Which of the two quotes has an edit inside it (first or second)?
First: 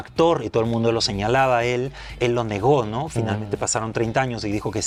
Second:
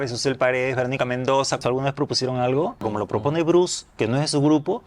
second